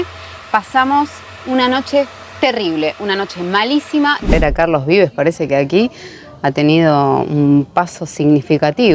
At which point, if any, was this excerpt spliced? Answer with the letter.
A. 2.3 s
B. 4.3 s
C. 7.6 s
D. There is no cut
B